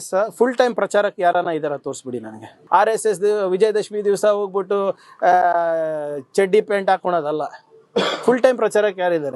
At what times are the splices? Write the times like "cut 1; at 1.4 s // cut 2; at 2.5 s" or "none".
cut 1; at 2.5 s

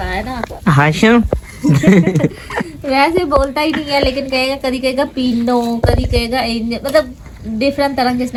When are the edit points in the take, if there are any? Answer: none

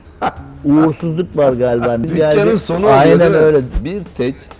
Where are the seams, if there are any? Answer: cut 1; at 2.0 s // cut 2; at 3.8 s

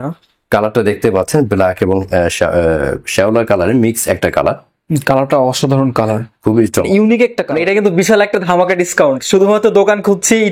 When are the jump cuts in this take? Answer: cut 1; at 7.4 s

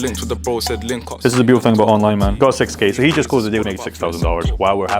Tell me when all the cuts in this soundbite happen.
cut 1; at 1.2 s // cut 2; at 2.3 s // cut 3; at 3.6 s

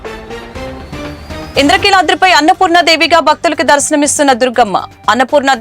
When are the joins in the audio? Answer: none

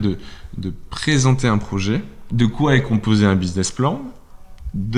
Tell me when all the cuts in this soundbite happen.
cut 1; at 2.2 s

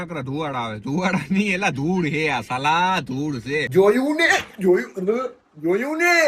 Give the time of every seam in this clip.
cut 1; at 3.7 s

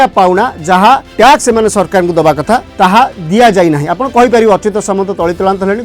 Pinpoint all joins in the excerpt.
cut 1; at 1.1 s // cut 2; at 2.7 s

